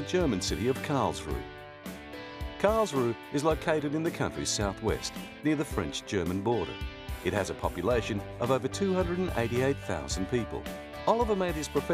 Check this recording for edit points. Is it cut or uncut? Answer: uncut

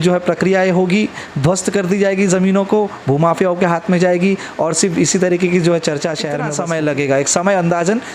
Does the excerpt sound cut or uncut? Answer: cut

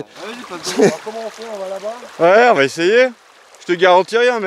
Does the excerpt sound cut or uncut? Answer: cut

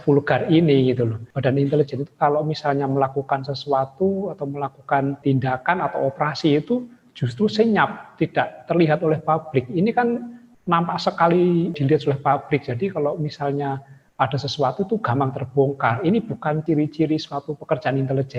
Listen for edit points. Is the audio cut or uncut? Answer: cut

